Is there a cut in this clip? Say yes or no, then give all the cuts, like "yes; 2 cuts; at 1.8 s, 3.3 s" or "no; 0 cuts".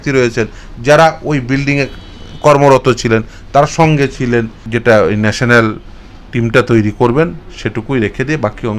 yes; 1 cut; at 4.6 s